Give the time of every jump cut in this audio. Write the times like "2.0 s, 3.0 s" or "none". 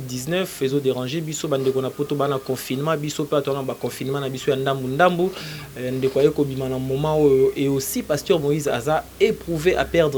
none